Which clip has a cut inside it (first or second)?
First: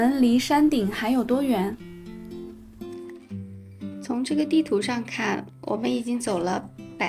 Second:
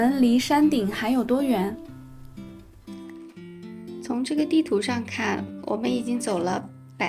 first